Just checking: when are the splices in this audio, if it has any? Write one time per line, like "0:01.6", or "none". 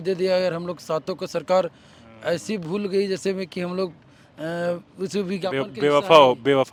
none